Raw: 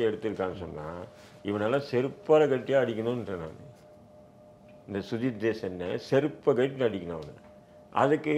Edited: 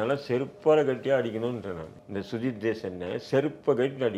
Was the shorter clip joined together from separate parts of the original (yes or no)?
yes